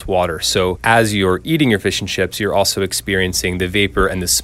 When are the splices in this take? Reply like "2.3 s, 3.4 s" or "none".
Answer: none